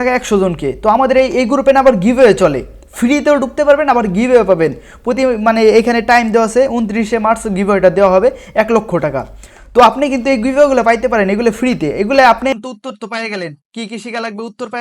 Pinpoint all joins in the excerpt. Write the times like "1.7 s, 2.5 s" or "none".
12.5 s